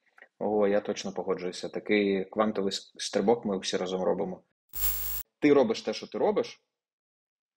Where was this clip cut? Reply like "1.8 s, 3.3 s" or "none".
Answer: 4.9 s